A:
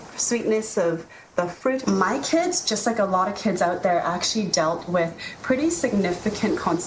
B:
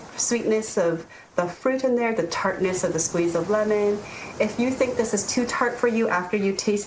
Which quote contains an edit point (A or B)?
A